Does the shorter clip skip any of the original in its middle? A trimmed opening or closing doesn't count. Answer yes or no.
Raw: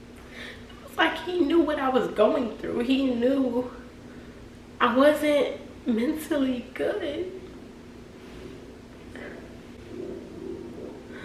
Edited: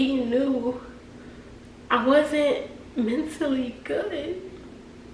no